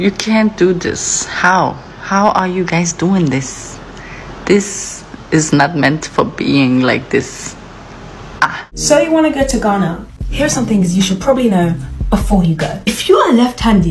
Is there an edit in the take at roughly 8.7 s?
yes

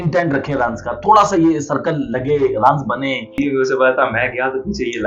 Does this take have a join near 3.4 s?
yes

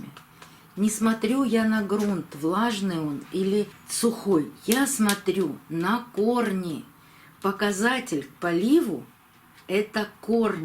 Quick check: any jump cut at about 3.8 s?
yes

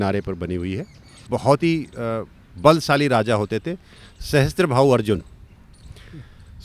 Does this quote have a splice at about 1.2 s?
yes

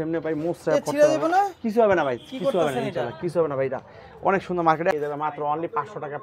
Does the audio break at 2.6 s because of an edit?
no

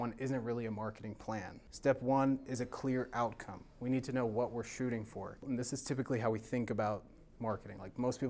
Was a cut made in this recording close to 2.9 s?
no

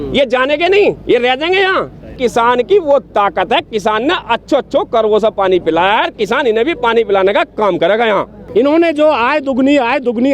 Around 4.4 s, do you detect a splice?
no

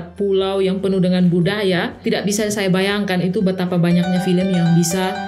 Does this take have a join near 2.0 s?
yes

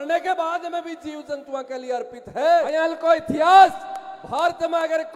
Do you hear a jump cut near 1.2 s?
no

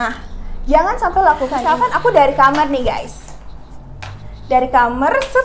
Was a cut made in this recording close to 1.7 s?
yes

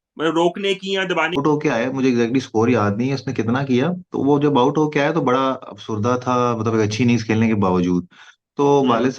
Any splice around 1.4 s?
yes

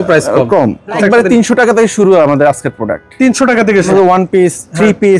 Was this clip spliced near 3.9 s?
yes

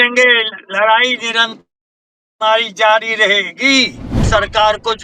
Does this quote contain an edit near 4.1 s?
yes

